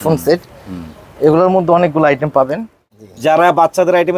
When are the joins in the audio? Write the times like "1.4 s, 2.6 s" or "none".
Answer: 2.5 s